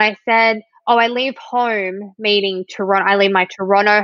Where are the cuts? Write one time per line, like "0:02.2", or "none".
none